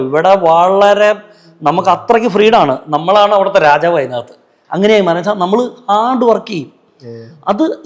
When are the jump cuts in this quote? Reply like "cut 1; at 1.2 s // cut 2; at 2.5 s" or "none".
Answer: none